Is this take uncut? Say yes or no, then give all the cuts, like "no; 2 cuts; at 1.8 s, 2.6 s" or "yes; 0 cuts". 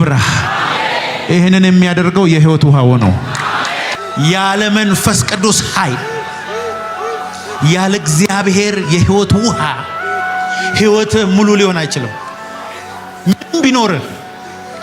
no; 1 cut; at 4.0 s